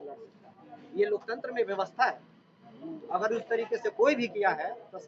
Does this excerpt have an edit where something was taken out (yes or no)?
no